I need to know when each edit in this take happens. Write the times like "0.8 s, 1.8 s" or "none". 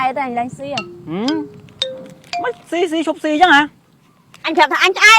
none